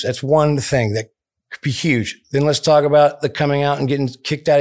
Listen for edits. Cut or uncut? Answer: uncut